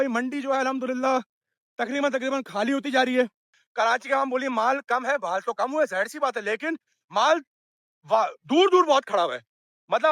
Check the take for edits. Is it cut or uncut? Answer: cut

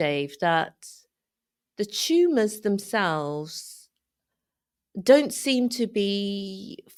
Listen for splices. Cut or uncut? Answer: uncut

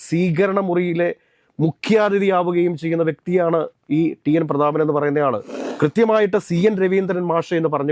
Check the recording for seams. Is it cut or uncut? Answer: cut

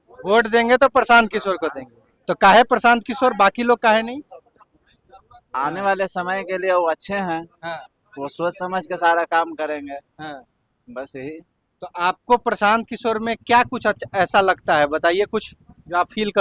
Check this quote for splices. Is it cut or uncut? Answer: uncut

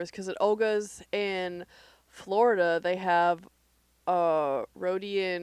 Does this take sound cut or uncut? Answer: uncut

